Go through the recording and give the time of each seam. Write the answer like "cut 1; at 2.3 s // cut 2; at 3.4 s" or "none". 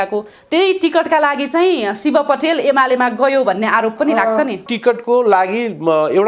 cut 1; at 4.6 s

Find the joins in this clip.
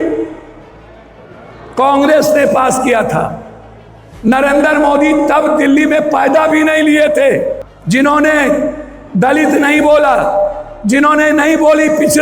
cut 1; at 7.7 s

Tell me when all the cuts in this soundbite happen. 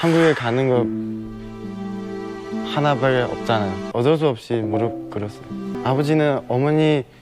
cut 1; at 3.8 s // cut 2; at 5.8 s

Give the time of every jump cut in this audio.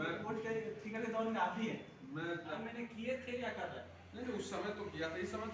cut 1; at 2.6 s

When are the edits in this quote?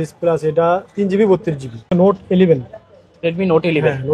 cut 1; at 1.9 s

